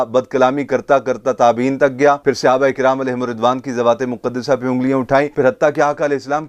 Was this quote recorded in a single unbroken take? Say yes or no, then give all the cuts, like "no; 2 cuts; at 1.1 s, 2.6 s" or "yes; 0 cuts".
no; 1 cut; at 5.3 s